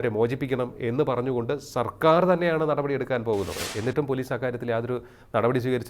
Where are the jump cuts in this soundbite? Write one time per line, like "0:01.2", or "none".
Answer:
0:03.6